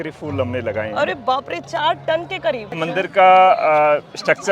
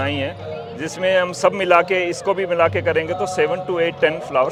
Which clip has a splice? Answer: first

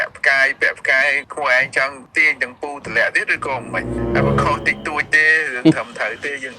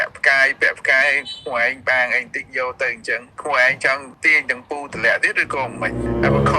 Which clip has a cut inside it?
first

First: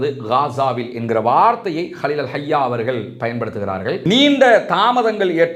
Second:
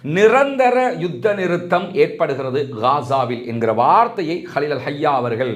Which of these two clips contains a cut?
first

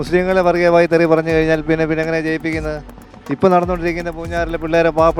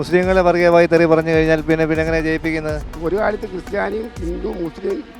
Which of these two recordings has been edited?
second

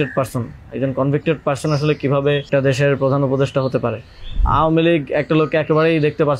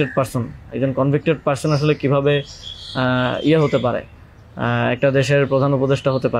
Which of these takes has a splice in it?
first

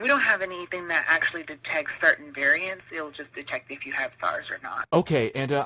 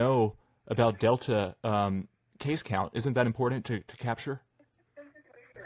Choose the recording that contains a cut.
first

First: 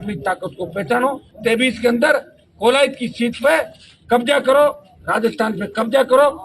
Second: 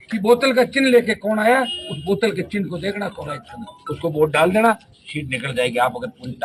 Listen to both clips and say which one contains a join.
first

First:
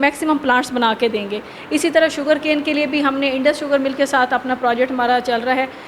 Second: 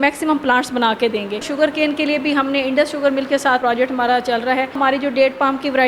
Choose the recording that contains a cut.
second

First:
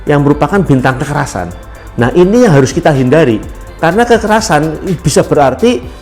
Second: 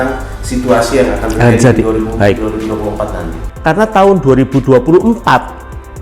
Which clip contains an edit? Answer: second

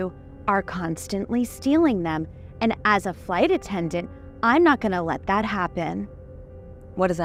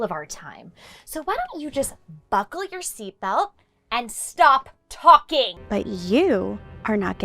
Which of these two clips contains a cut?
second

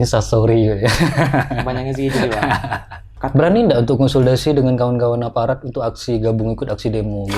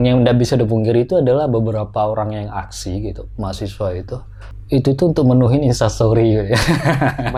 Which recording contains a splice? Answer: first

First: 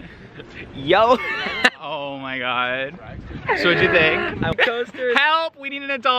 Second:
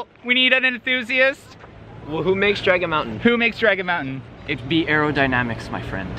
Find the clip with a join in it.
first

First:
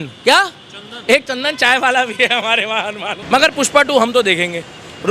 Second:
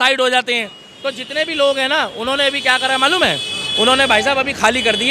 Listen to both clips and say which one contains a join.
first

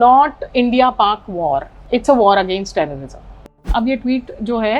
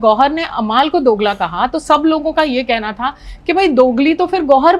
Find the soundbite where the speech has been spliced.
first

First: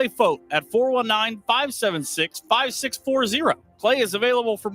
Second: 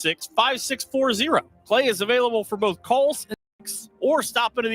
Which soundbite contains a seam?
second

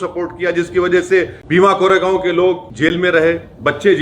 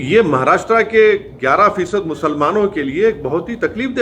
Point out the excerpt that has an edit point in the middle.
first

